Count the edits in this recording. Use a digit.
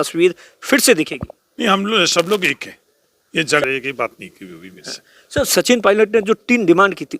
1